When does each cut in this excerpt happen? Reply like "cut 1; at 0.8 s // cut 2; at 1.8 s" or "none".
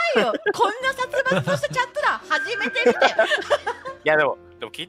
none